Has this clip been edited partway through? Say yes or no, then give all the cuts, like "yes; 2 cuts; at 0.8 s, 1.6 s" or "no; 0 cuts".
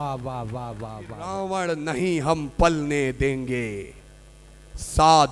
yes; 1 cut; at 1.2 s